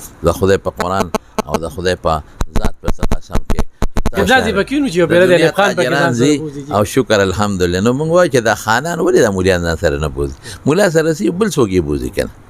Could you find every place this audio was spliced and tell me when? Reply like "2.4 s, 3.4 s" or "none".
4.2 s